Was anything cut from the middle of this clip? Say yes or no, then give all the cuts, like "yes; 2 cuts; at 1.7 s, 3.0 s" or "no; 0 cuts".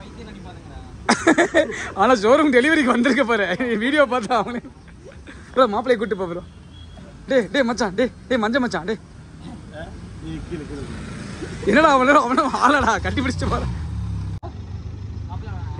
yes; 1 cut; at 14.5 s